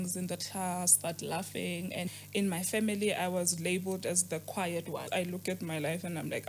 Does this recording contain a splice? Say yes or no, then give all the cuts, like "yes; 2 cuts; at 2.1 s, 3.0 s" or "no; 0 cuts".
yes; 3 cuts; at 0.9 s, 2.1 s, 5.0 s